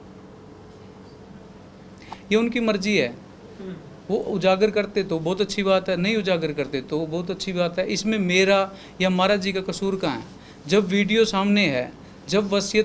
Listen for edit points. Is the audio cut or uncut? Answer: cut